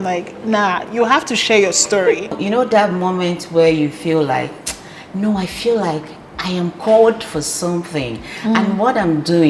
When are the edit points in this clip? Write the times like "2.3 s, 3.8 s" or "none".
2.3 s